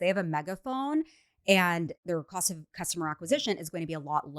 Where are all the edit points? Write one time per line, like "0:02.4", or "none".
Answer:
0:02.0